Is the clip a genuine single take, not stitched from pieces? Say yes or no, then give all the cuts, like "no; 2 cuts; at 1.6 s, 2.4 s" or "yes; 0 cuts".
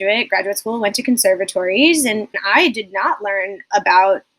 no; 1 cut; at 2.4 s